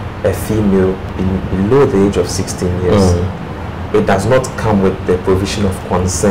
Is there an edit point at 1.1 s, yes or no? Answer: yes